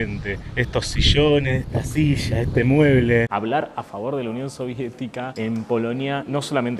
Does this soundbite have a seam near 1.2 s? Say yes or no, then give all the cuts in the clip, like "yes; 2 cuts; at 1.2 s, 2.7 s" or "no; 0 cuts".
no; 1 cut; at 3.3 s